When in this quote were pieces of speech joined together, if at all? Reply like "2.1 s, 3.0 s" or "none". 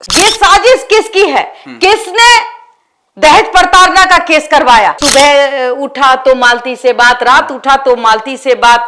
5.0 s